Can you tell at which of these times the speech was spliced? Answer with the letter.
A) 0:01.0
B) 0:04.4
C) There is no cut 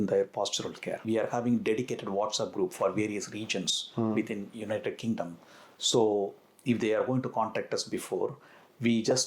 A